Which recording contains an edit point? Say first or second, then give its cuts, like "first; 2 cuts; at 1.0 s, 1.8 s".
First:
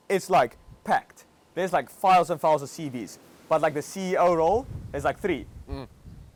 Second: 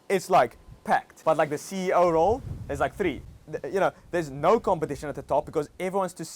second; 2 cuts; at 1.1 s, 3.3 s